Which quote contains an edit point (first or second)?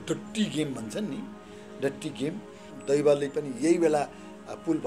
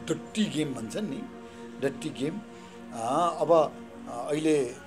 first